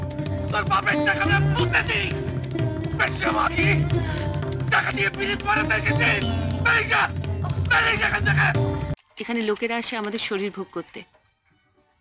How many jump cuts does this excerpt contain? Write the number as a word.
one